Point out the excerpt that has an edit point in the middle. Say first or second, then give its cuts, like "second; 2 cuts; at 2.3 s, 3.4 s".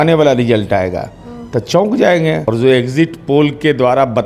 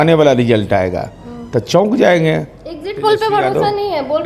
first; 1 cut; at 2.5 s